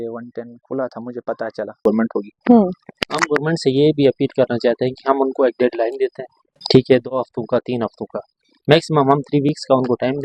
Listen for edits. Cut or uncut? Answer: cut